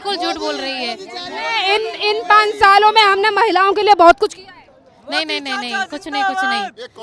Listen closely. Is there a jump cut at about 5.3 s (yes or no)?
no